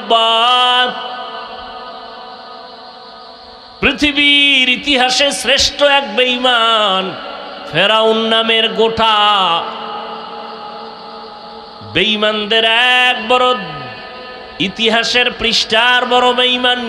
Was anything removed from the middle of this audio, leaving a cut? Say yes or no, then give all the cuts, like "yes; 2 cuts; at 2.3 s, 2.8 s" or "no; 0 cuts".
no; 0 cuts